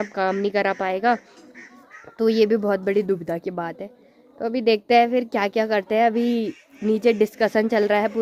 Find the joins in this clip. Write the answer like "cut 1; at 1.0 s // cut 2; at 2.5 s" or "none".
none

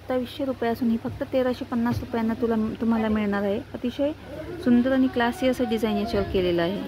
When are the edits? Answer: none

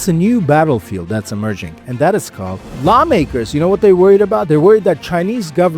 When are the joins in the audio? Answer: cut 1; at 2.7 s

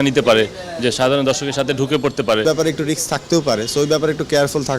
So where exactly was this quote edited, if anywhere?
cut 1; at 2.4 s

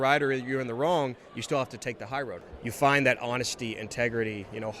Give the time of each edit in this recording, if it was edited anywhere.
cut 1; at 2.4 s

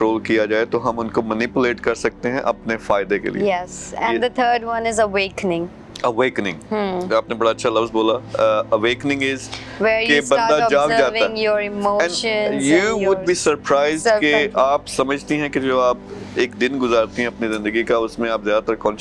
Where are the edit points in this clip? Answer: none

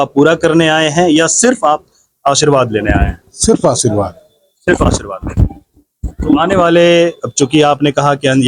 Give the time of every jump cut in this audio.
none

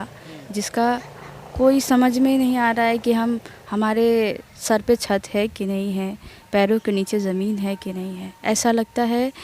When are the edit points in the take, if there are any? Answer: cut 1; at 8.3 s

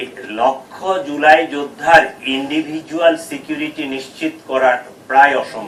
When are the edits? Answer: none

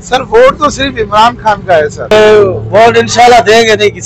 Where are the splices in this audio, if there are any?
cut 1; at 2.1 s

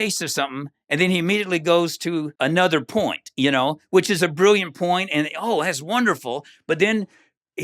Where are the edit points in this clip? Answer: cut 1; at 2.3 s

